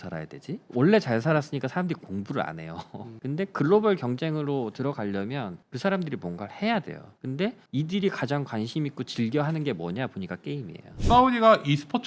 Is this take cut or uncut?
cut